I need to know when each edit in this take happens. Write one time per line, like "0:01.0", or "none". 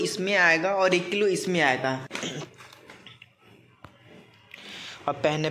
0:02.1